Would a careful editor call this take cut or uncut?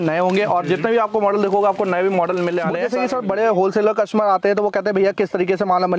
cut